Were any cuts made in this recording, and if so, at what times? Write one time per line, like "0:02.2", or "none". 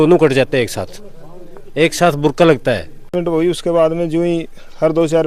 0:03.1